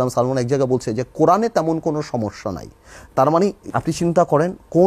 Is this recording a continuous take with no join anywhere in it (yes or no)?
no